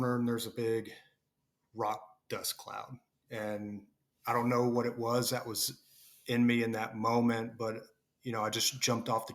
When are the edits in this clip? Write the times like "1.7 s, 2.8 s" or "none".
none